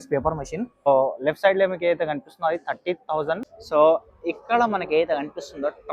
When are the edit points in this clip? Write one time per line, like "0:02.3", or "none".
0:00.9
0:03.5